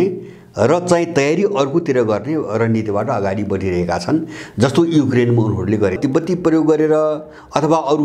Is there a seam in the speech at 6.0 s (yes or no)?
yes